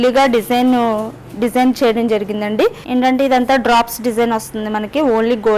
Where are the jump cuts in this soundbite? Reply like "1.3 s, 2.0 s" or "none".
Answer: 2.8 s